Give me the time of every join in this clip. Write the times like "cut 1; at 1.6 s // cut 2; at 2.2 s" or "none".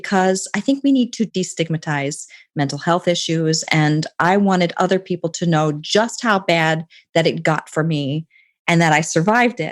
cut 1; at 1.3 s